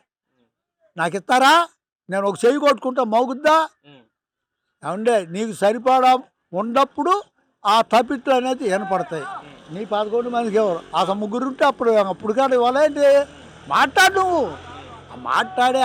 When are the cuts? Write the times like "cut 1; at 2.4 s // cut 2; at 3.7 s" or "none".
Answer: none